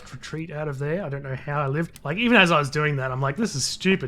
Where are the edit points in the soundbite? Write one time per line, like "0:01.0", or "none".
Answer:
0:02.0